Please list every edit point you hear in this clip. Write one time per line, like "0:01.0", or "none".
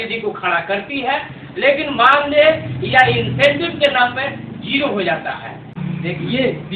0:05.8